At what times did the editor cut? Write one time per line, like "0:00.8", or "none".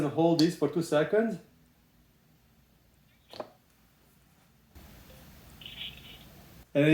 none